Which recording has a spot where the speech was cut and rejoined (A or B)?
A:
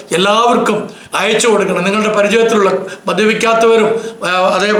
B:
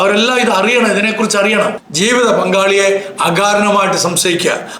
B